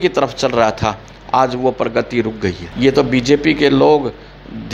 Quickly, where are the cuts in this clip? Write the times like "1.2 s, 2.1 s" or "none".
2.6 s